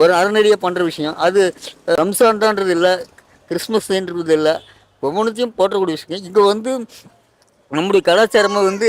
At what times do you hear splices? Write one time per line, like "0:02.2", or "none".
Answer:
0:02.0